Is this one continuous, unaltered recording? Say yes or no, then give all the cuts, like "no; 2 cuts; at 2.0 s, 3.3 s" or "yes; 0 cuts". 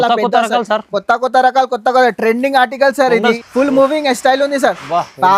no; 1 cut; at 3.4 s